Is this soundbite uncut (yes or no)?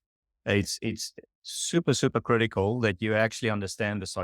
yes